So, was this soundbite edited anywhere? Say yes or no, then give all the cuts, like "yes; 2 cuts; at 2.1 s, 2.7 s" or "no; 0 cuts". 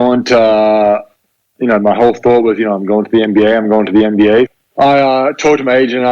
yes; 1 cut; at 4.5 s